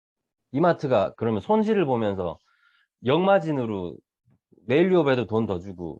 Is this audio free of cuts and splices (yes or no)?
yes